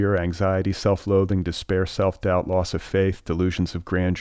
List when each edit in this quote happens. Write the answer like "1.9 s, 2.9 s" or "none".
none